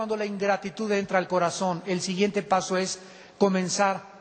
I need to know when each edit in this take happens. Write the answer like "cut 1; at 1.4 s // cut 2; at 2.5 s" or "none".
none